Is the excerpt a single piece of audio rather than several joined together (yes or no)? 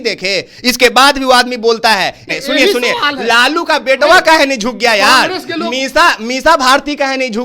no